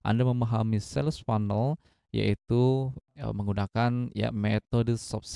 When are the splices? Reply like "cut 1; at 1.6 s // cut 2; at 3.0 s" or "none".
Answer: cut 1; at 3.0 s